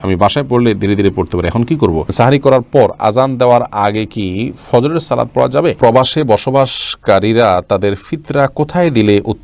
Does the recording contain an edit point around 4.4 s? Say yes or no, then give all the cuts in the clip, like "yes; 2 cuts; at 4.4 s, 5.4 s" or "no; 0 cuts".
no; 2 cuts; at 2.1 s, 5.8 s